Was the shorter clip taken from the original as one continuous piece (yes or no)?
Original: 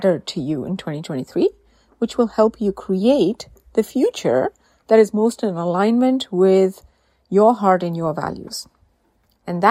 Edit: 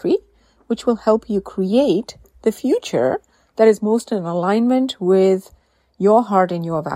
yes